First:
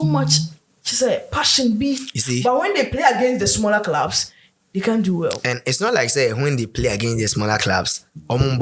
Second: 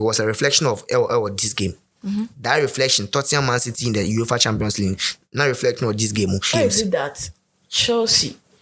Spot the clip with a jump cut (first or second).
second